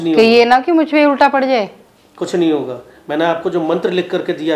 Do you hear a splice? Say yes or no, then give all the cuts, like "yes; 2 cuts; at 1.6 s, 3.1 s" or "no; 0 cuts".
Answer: no; 0 cuts